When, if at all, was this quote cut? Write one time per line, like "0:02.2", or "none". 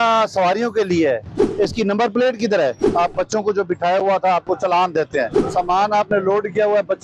0:01.4
0:02.8
0:05.4